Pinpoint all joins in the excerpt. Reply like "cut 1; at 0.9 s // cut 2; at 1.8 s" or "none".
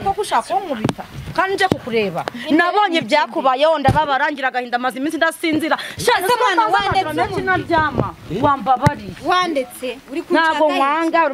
none